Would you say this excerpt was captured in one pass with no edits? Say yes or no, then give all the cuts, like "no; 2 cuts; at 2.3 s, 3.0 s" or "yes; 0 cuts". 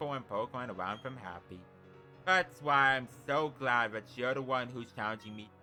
yes; 0 cuts